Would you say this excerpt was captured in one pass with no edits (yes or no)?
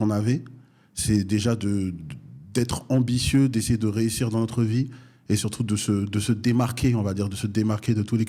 yes